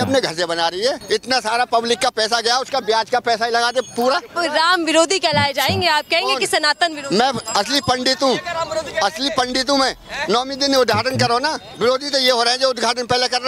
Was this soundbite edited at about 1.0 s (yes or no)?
yes